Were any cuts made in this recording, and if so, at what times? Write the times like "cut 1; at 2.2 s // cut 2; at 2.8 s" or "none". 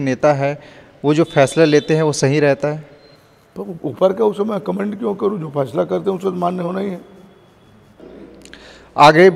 cut 1; at 8.3 s